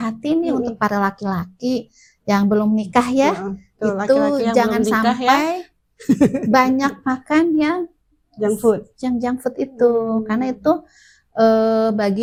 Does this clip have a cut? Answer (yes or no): no